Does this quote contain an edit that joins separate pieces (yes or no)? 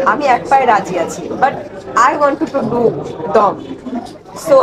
no